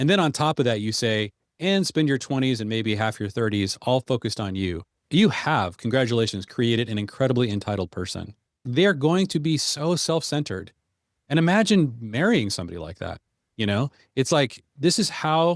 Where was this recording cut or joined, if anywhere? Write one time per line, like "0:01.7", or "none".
0:05.0
0:08.6
0:14.7